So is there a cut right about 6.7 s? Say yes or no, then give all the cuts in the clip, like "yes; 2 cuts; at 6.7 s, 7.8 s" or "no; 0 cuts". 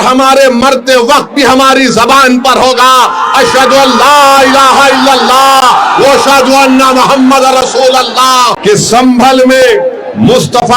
no; 1 cut; at 8.5 s